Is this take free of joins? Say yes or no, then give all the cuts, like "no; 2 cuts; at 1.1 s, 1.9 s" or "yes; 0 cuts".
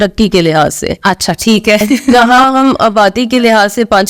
yes; 0 cuts